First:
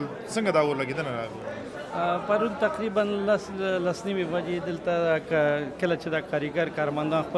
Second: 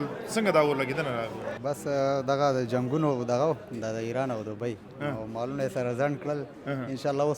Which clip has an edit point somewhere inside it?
second; 1 cut; at 1.5 s

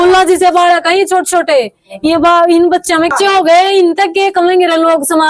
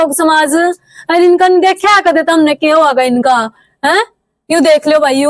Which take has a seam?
first; 1 cut; at 3.1 s

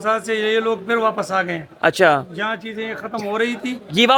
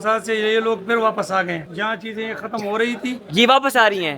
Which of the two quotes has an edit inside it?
second; 1 cut; at 1.7 s

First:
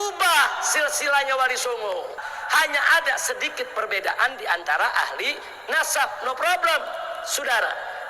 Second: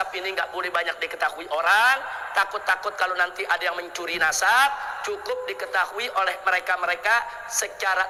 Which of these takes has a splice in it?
first; 1 cut; at 2.2 s

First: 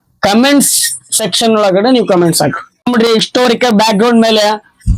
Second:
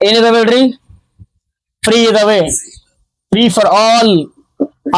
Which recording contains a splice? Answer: first; 1 cut; at 2.8 s

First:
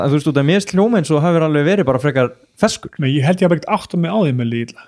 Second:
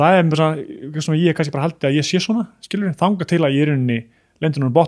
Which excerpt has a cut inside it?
first; 1 cut; at 2.9 s

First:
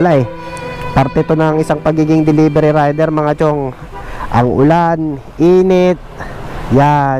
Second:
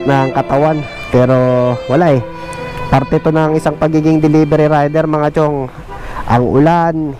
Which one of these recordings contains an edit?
second; 1 cut; at 0.9 s

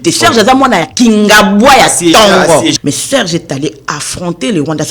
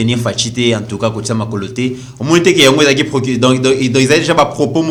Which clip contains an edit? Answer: first; 1 cut; at 2.8 s

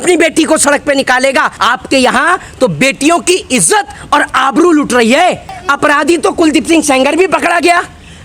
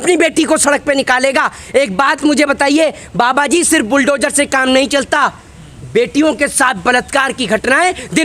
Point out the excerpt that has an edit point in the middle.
first; 2 cuts; at 1.6 s, 5.5 s

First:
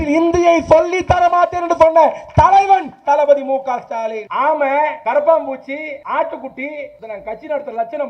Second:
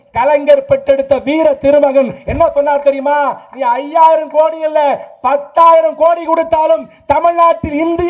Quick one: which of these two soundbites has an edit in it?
first; 4 cuts; at 4.2 s, 5.0 s, 5.9 s, 7.0 s

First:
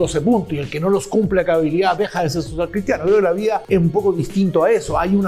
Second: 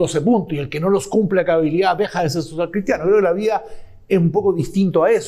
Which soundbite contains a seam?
first; 1 cut; at 3.6 s

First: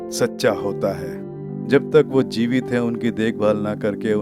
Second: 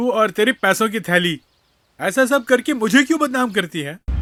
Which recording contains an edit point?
first; 1 cut; at 1.6 s

